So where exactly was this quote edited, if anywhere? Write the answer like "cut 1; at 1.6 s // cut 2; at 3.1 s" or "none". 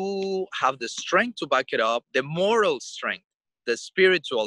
cut 1; at 2.1 s